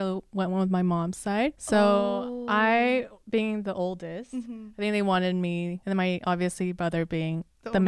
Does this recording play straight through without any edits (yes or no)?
no